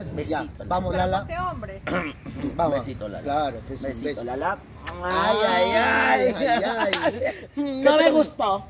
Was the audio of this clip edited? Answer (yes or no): no